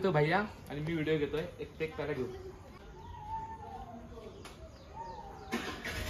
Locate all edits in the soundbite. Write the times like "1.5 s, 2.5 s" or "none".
2.8 s